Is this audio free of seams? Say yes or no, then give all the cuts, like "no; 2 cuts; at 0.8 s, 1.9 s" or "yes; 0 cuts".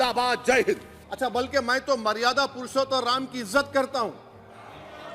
no; 1 cut; at 1.0 s